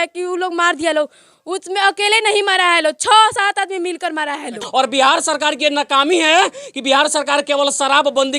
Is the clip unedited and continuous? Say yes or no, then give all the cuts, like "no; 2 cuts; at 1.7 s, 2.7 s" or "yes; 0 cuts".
no; 1 cut; at 4.6 s